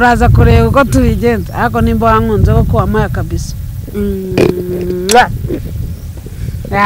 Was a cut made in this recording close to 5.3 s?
no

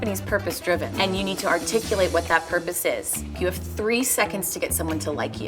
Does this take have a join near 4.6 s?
no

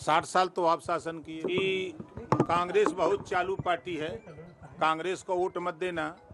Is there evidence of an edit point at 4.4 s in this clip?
no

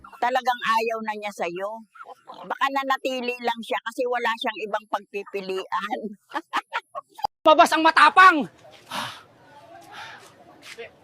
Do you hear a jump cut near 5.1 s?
no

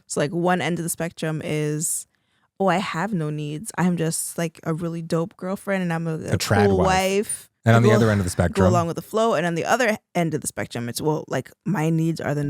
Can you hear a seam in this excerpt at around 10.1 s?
no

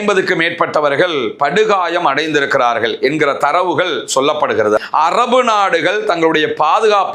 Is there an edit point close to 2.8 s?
no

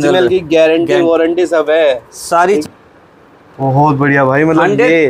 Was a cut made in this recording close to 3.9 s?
no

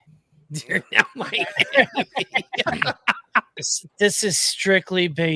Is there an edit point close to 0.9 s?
no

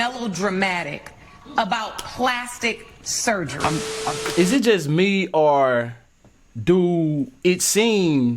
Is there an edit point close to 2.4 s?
no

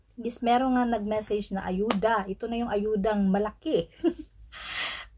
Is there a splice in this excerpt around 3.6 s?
no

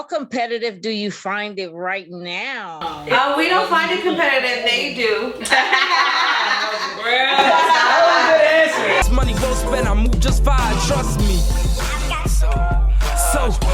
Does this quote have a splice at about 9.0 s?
yes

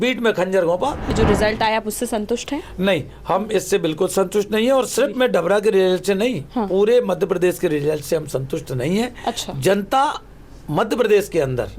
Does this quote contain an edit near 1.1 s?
yes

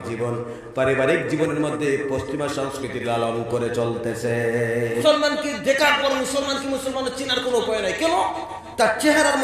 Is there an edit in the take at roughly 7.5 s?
no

